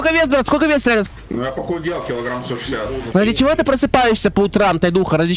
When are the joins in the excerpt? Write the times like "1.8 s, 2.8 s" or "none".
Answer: 3.0 s